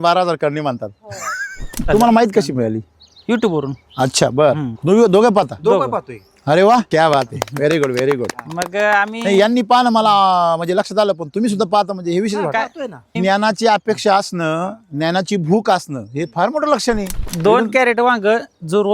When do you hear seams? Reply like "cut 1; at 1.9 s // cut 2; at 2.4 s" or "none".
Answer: cut 1; at 1.9 s // cut 2; at 6.9 s // cut 3; at 13.1 s // cut 4; at 17.2 s